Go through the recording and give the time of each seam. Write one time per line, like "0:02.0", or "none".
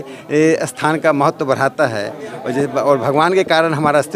none